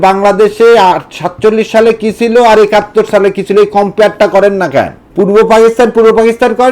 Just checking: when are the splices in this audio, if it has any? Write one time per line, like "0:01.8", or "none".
0:05.0